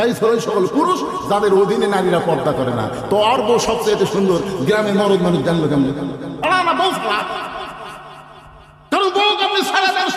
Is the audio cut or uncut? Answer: cut